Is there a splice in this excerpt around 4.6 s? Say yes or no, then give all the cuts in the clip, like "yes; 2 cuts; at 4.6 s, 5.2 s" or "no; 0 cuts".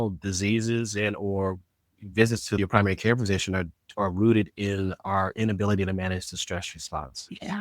no; 1 cut; at 2.6 s